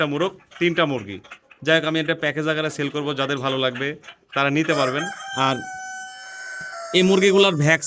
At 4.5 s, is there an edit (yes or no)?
no